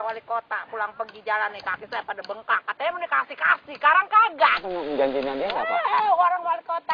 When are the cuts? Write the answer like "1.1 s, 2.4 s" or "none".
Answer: none